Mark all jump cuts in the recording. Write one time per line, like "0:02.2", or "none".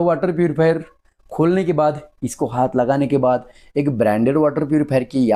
none